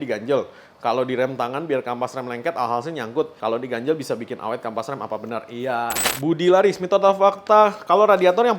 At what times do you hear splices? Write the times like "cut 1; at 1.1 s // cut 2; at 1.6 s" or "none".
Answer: cut 1; at 6.0 s